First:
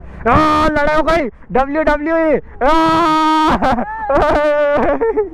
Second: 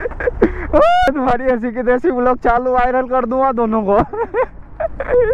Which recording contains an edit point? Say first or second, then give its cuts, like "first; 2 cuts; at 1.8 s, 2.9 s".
second; 1 cut; at 1.1 s